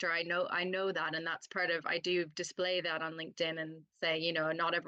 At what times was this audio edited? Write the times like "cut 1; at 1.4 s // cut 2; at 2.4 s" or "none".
none